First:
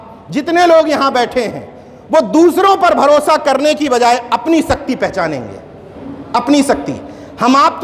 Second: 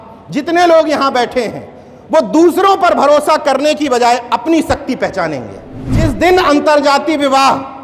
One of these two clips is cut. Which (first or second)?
second